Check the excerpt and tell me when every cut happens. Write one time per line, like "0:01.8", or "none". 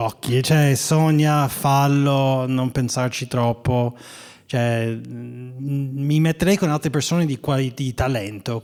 none

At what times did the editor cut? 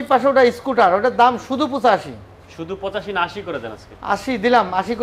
none

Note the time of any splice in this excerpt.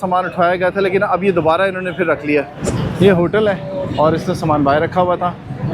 0:02.6

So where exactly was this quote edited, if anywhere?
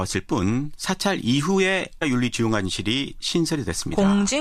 none

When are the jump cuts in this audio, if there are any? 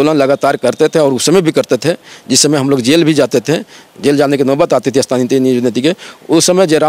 none

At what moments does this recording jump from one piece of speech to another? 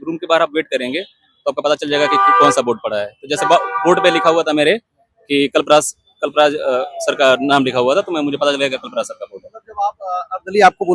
none

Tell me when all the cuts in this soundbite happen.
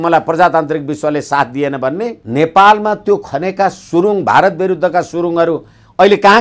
0:02.2

